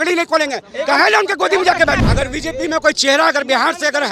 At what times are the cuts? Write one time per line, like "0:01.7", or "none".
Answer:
0:02.0